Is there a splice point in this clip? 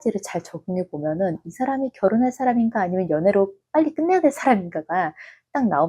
no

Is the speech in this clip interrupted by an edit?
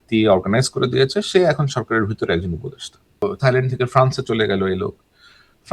yes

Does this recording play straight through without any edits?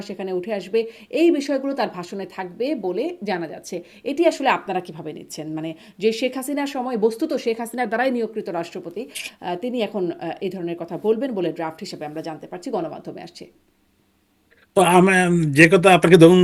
yes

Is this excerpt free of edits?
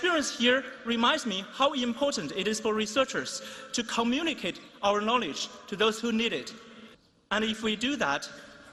yes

